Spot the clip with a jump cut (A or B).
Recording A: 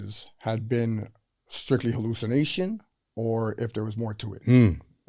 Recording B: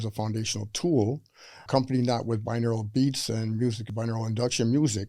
B